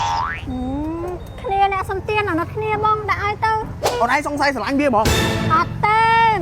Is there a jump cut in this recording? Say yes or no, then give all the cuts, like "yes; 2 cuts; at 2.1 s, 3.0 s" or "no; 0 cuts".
yes; 1 cut; at 3.9 s